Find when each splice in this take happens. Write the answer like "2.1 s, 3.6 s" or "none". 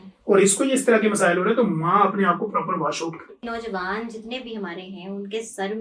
3.5 s